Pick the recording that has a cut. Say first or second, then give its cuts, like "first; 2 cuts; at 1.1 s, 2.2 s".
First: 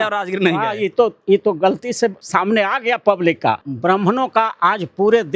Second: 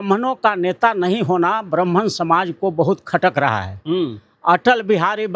first; 2 cuts; at 2.2 s, 3.7 s